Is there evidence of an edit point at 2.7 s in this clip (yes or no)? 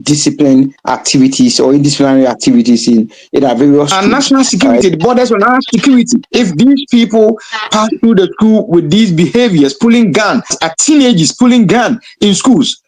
no